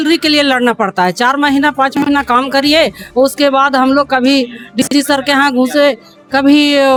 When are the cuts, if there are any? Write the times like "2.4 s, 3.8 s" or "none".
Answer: none